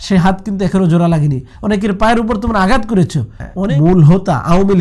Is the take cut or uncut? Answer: cut